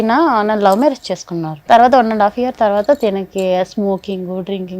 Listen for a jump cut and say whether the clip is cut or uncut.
cut